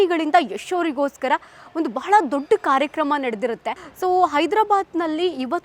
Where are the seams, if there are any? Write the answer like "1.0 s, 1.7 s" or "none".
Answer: 3.8 s